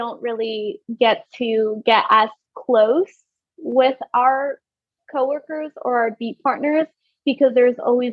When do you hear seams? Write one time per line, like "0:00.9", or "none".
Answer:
none